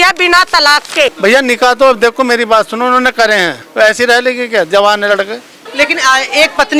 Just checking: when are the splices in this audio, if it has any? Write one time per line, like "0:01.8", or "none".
0:01.2
0:03.6
0:05.6